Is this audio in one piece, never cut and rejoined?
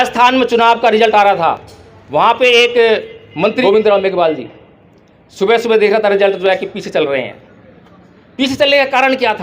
no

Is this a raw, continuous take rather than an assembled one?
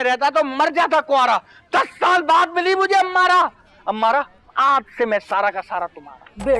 yes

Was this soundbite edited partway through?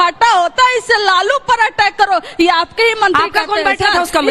yes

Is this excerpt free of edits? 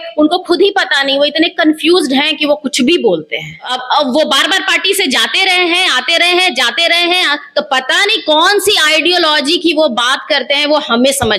no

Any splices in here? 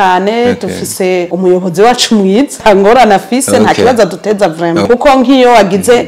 yes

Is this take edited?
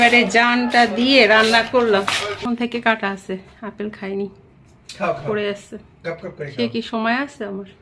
yes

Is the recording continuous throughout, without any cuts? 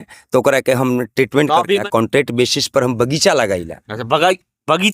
no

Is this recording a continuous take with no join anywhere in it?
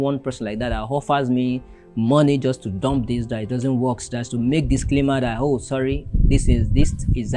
yes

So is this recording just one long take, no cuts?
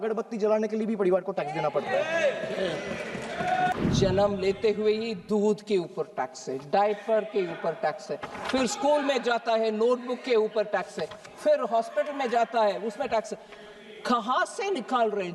no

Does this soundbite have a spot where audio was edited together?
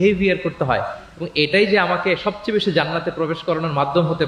no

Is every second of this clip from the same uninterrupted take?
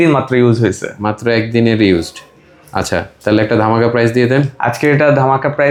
yes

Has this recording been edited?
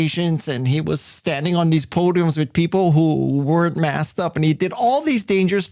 no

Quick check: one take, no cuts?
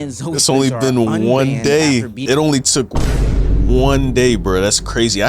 no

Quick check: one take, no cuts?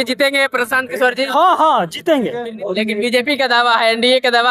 no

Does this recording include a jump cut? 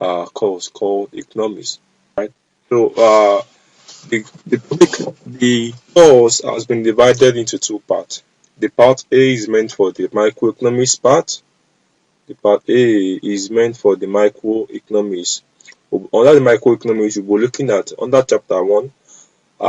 yes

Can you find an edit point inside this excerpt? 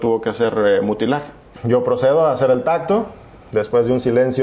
yes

